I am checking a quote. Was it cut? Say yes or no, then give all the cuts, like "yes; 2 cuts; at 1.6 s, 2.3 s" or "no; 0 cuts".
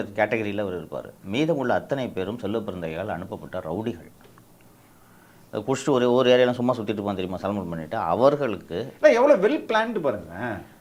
no; 0 cuts